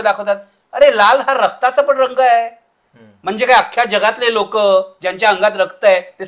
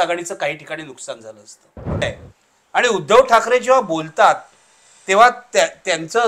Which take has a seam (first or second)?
second